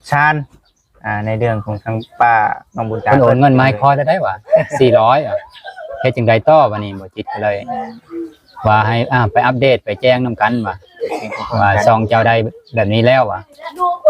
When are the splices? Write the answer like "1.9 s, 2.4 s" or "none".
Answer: 3.1 s